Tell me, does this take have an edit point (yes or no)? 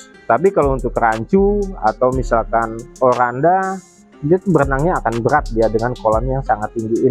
yes